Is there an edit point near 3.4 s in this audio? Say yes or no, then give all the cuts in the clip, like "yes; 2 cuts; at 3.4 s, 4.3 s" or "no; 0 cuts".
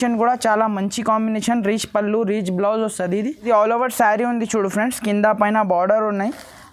yes; 1 cut; at 3.4 s